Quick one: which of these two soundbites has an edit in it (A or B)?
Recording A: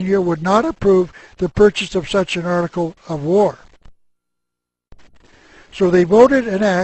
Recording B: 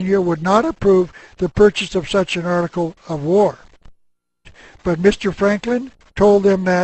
A